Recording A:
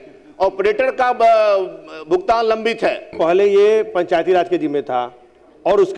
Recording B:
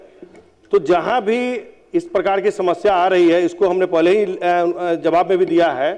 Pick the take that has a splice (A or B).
A